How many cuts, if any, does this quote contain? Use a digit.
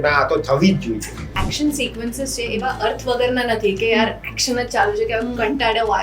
1